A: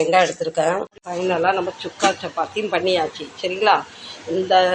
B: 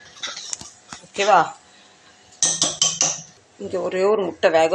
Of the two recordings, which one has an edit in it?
A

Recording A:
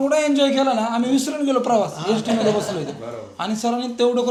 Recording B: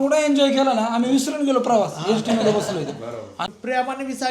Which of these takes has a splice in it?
B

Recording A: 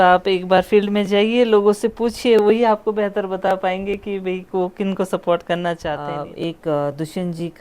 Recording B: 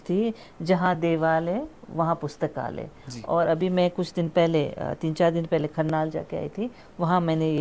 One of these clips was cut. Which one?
A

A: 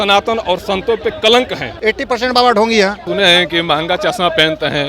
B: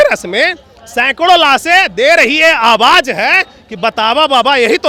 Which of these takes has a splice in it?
A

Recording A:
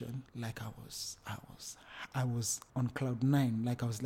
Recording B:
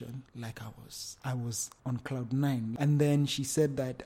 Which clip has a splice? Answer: B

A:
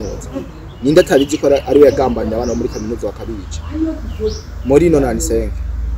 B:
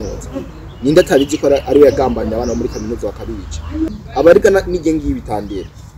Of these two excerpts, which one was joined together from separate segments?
B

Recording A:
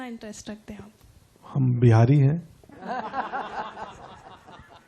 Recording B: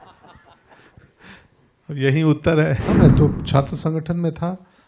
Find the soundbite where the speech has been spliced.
B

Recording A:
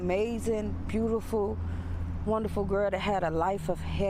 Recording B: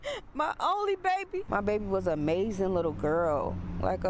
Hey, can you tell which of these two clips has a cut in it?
B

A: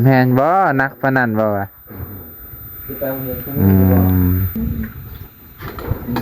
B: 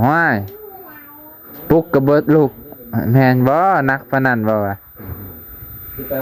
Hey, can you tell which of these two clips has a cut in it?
A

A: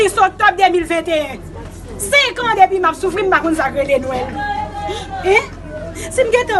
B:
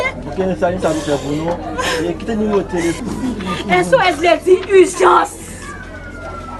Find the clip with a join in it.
B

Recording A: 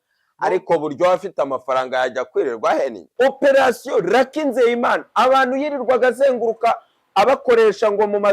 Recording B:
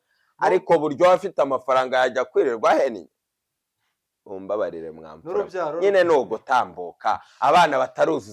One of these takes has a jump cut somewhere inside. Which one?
A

